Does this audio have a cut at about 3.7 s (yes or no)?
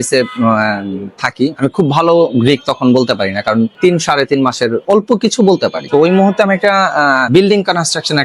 yes